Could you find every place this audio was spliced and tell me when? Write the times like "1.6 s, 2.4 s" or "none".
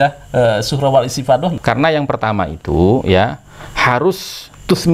1.6 s